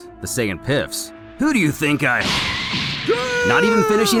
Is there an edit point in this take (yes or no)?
no